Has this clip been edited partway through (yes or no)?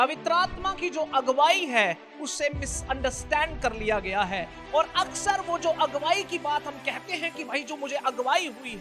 yes